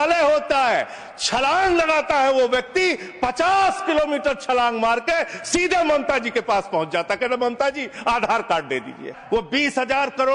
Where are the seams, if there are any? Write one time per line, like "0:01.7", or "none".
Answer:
0:09.1